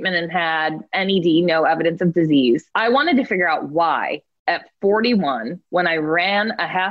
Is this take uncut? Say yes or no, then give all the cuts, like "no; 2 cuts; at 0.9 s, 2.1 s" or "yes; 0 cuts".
no; 3 cuts; at 0.9 s, 2.7 s, 5.5 s